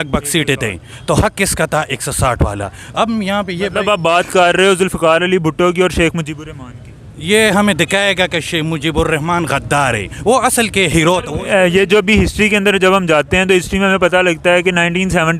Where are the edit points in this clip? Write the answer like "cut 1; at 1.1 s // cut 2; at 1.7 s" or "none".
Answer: cut 1; at 11.3 s